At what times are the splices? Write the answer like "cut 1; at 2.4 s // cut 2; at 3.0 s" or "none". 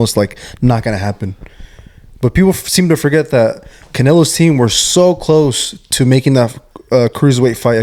none